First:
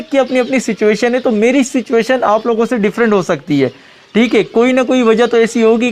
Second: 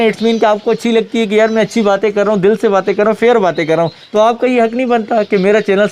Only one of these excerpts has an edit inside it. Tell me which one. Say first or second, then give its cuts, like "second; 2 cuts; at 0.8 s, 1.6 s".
second; 1 cut; at 4.0 s